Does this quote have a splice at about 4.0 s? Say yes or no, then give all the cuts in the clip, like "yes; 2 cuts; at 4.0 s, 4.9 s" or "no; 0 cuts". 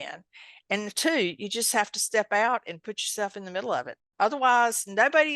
yes; 1 cut; at 4.0 s